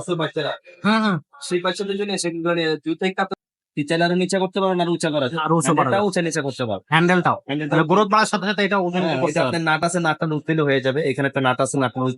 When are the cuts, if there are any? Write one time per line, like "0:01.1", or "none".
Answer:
0:03.3